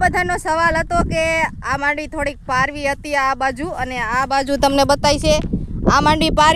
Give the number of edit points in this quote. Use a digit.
0